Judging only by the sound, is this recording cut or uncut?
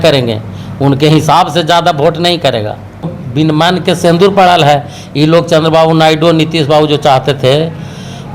cut